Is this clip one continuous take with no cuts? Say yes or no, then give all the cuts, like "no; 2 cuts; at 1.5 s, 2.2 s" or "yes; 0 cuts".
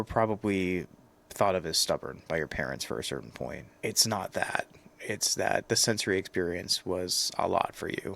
no; 1 cut; at 3.7 s